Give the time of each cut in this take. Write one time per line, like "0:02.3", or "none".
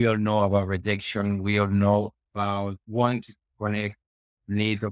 0:02.8